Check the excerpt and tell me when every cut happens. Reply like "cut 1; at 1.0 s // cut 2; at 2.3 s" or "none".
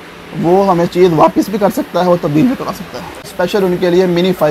cut 1; at 3.2 s